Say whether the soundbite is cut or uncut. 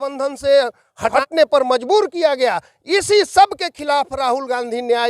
cut